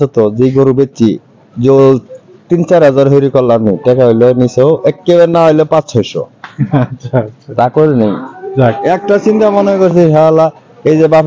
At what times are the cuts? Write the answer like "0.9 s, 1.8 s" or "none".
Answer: none